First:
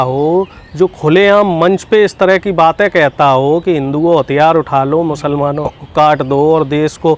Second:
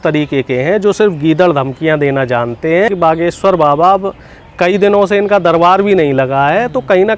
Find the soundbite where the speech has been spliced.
second; 1 cut; at 2.9 s

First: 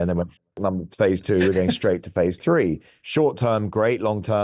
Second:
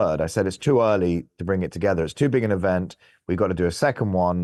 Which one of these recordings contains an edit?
first; 1 cut; at 3.0 s

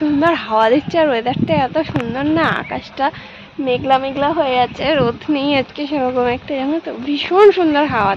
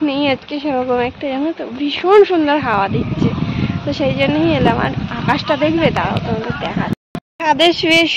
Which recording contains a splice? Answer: second; 1 cut; at 7.2 s

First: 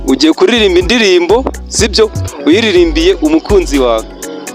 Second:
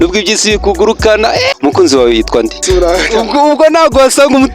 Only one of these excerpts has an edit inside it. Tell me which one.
second; 2 cuts; at 1.5 s, 2.6 s

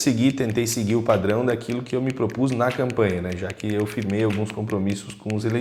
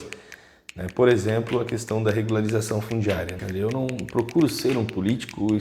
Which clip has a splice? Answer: second; 1 cut; at 3.4 s

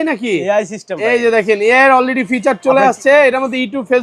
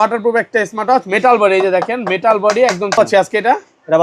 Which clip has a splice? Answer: second; 1 cut; at 3.0 s

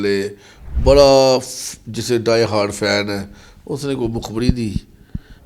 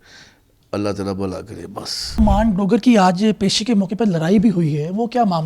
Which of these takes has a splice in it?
second; 1 cut; at 2.2 s

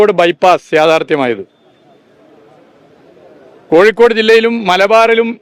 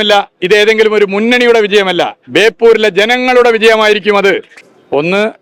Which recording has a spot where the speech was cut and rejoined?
second; 1 cut; at 4.5 s

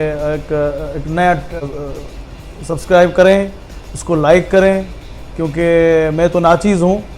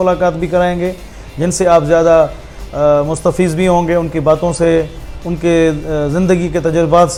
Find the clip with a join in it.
first; 1 cut; at 1.6 s

